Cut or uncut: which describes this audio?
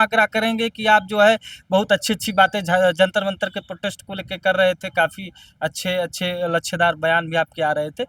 uncut